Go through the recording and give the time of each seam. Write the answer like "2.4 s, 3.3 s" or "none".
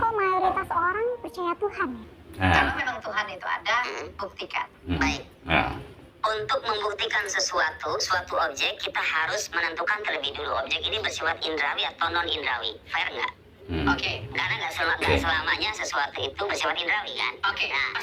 2.7 s